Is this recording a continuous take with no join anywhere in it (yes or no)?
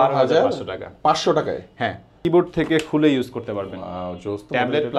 no